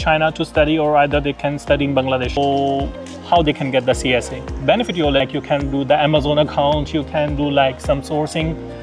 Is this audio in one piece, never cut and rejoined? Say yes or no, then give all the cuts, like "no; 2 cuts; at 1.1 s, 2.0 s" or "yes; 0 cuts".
no; 2 cuts; at 2.4 s, 5.2 s